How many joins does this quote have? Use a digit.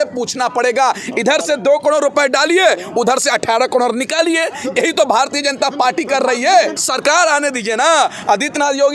1